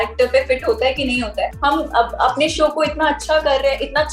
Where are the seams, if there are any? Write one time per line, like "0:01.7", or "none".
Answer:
0:01.5